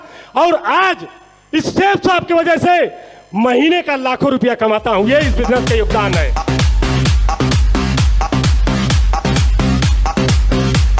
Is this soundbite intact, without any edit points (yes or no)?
yes